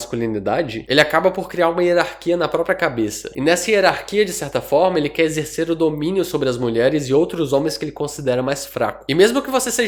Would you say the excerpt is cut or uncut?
uncut